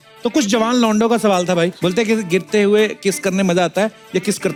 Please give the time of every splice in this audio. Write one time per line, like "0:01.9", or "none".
none